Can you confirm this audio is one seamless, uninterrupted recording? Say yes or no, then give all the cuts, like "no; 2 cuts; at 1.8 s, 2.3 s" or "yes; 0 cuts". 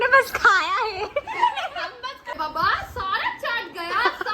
no; 1 cut; at 2.3 s